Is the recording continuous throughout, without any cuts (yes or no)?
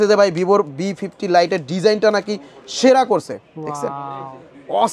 yes